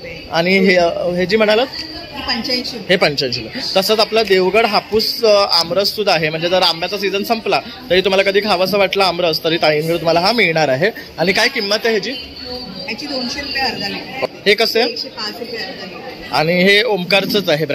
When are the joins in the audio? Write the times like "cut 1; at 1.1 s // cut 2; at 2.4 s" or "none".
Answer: cut 1; at 14.3 s